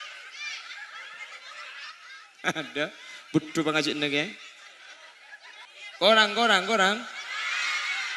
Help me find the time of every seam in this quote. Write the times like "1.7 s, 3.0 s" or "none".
5.7 s